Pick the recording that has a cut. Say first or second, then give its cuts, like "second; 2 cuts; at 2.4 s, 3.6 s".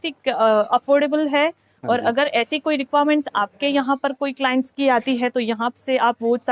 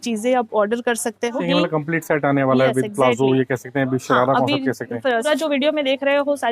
second; 2 cuts; at 1.4 s, 5.2 s